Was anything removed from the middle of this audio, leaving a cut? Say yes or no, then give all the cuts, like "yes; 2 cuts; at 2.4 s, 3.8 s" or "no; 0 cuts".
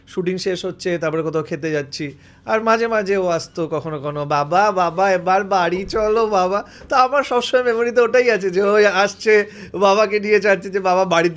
no; 0 cuts